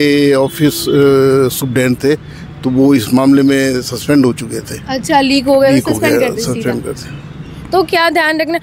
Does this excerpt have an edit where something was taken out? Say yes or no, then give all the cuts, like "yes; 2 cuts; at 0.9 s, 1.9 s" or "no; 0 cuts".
no; 0 cuts